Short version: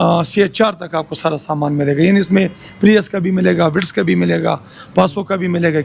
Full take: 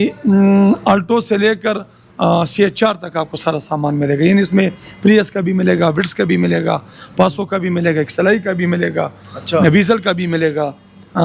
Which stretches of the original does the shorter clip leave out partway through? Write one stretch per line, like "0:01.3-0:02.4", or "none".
none

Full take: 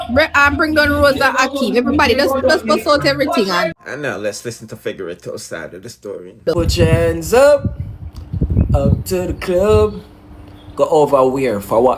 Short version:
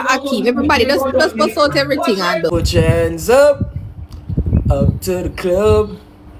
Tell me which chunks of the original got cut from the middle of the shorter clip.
0:03.7-0:06.4

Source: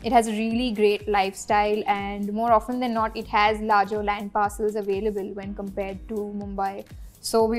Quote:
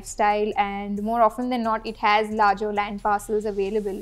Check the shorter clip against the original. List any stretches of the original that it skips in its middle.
none

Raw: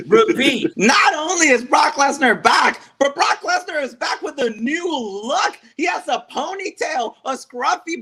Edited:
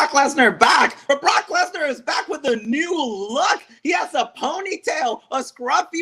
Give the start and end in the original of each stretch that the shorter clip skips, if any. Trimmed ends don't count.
0:02.9-0:03.0

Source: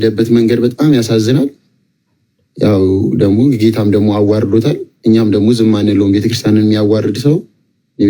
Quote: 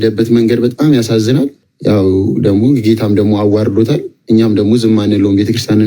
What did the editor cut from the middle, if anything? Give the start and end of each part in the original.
0:01.7-0:02.4

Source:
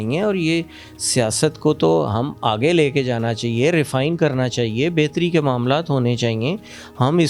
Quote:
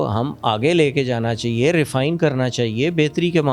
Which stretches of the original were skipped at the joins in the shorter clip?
none

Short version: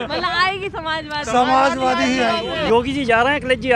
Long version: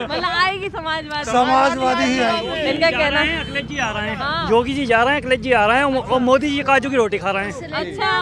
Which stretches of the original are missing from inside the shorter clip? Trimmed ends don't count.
0:02.6-0:04.4

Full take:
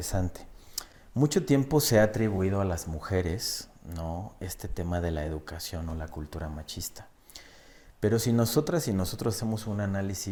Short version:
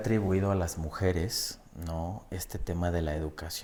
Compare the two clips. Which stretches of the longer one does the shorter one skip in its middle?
none

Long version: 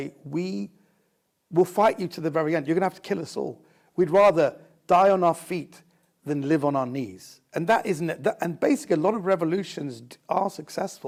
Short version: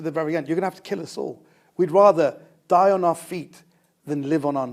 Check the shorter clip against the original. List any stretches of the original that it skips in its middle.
none

